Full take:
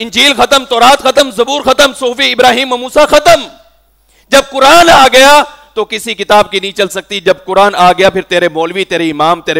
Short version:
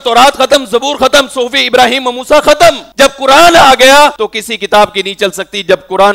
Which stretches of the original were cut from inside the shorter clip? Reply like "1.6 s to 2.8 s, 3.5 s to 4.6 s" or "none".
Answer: 3.5 s to 4.2 s, 5.5 s to 5.7 s